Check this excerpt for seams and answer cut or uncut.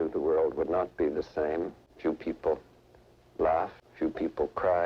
cut